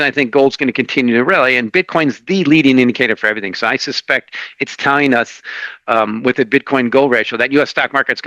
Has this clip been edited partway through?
no; 0 cuts

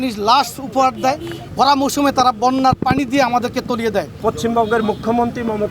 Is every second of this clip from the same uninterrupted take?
no; 2 cuts; at 1.4 s, 4.2 s

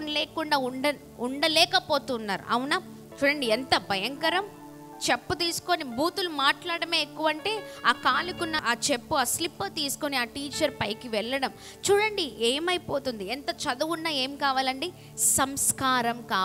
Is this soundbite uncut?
no; 2 cuts; at 3.0 s, 8.6 s

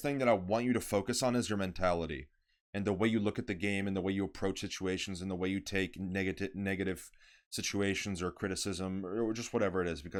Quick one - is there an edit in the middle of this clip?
no; 0 cuts

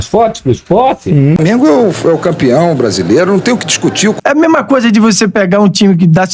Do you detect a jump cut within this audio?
yes; 2 cuts; at 1.4 s, 4.2 s

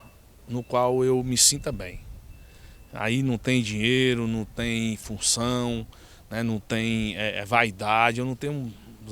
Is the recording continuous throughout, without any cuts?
yes; 0 cuts

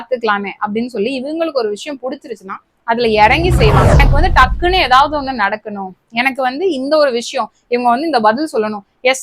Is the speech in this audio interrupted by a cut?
yes; 1 cut; at 4.0 s

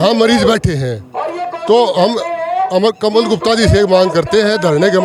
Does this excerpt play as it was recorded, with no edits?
yes; 0 cuts

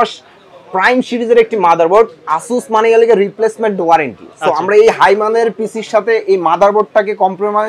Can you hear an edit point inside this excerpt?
no; 0 cuts

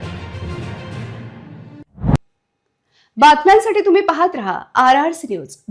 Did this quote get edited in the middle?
no; 0 cuts

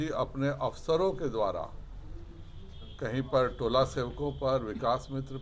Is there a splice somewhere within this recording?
no; 0 cuts

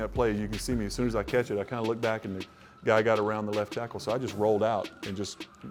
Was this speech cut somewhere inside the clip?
no; 0 cuts

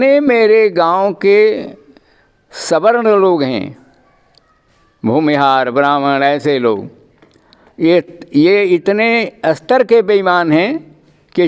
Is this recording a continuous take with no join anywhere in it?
yes; 0 cuts

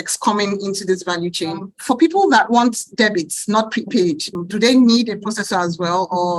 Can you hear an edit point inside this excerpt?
yes; 1 cut; at 1.7 s

